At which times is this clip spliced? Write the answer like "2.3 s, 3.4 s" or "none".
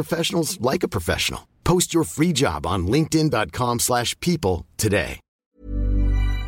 5.4 s